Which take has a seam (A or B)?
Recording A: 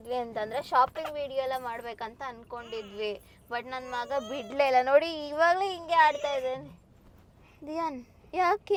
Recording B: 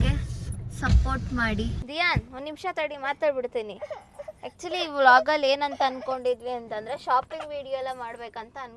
B